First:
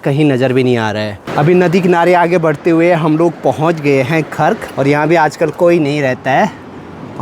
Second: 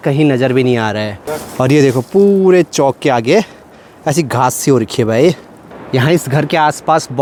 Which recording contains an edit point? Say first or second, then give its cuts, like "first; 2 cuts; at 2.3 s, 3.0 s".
first; 2 cuts; at 1.2 s, 4.6 s